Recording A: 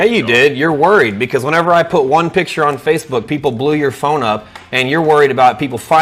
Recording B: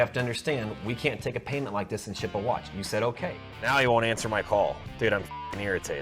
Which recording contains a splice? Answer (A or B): B